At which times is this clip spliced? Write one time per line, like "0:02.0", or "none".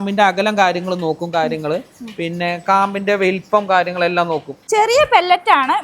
0:04.5